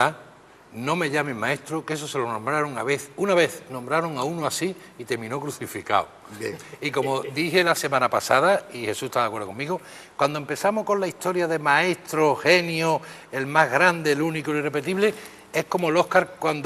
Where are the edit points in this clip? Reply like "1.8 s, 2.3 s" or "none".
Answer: none